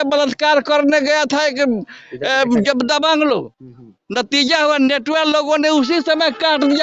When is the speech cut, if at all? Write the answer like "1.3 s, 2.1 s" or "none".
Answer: none